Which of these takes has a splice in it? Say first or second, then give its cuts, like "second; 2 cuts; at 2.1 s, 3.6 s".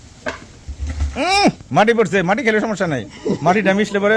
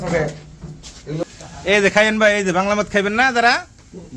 second; 1 cut; at 1.2 s